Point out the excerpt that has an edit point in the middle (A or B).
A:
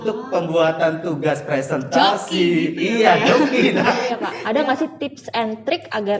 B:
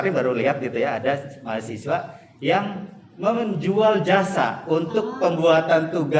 A